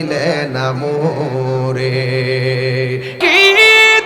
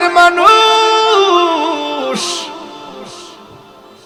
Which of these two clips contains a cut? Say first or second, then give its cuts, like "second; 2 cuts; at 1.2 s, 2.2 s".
first; 1 cut; at 3.1 s